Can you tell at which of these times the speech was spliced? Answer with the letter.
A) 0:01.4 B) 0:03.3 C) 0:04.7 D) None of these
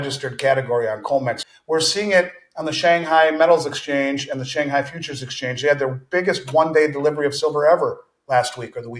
A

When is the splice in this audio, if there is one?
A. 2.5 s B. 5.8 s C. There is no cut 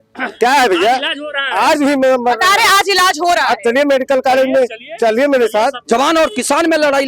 B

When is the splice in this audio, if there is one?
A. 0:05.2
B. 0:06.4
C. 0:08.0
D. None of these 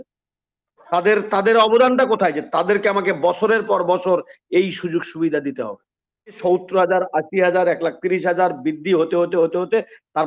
B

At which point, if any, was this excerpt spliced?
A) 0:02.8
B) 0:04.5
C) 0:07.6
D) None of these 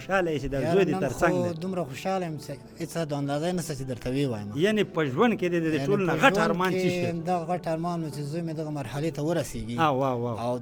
D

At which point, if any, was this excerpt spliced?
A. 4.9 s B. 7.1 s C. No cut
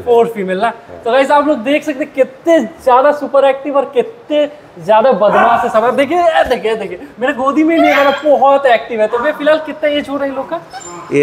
C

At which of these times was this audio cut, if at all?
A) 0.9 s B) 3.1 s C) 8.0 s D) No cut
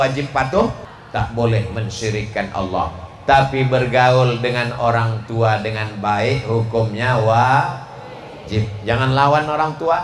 A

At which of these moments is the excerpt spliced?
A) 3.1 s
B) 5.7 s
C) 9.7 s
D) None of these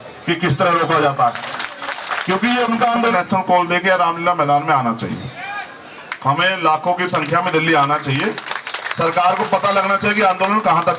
A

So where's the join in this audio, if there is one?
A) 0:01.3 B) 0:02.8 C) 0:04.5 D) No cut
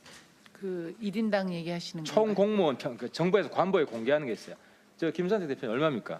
D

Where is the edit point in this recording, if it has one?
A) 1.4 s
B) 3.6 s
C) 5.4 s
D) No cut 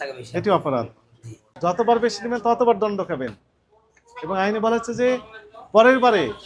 A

